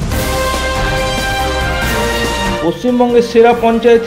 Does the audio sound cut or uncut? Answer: cut